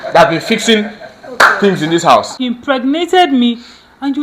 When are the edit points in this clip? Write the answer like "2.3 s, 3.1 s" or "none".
2.4 s